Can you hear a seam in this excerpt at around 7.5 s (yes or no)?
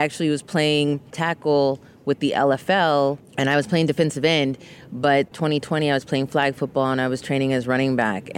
no